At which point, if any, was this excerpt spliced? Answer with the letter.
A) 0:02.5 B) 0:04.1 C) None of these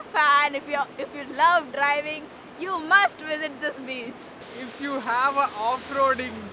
B